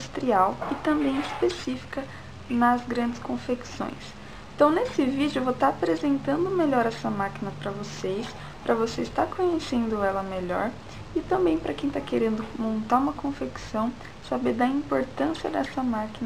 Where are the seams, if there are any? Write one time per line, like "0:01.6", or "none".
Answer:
0:10.8